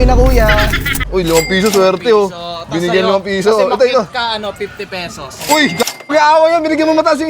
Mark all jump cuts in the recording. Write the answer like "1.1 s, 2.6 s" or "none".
1.0 s